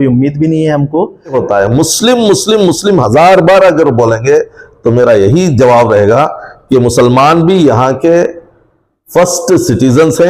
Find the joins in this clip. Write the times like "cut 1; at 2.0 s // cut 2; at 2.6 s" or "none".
cut 1; at 1.3 s

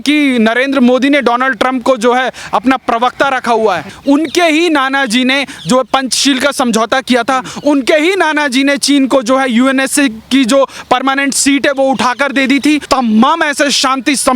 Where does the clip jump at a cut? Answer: cut 1; at 3.9 s // cut 2; at 12.8 s

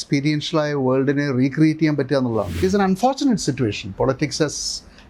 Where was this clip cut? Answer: cut 1; at 2.6 s

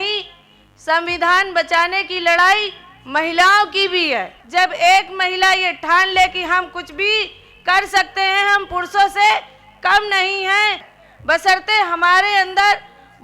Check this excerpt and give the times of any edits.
cut 1; at 4.4 s // cut 2; at 10.9 s

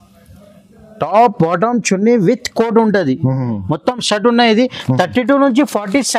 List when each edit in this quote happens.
none

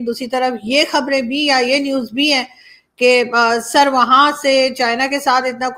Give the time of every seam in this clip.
none

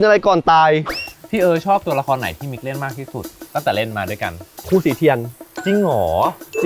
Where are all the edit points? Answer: cut 1; at 0.9 s

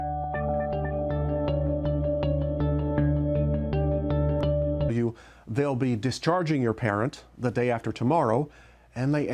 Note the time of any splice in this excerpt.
none

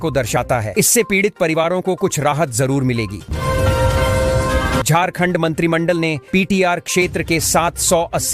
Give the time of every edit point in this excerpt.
cut 1; at 3.2 s // cut 2; at 4.8 s

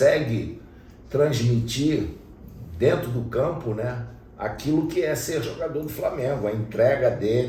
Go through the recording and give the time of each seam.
none

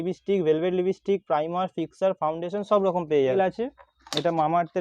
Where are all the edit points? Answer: cut 1; at 3.3 s

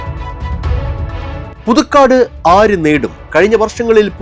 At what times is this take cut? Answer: cut 1; at 1.5 s

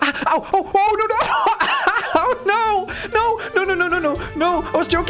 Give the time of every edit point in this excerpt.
none

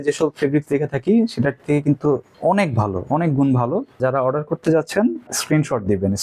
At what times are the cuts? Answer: cut 1; at 2.3 s // cut 2; at 4.0 s // cut 3; at 5.3 s

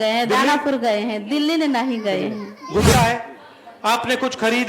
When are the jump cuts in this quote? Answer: cut 1; at 2.9 s

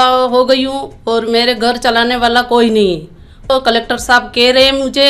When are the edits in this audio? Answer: cut 1; at 3.5 s

